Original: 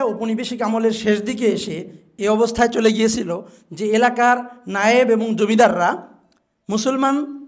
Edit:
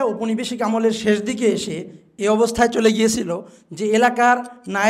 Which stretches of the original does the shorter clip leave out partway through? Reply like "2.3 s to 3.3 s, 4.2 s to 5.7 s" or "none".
none